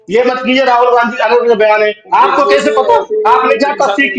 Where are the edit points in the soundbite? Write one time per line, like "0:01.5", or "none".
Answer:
none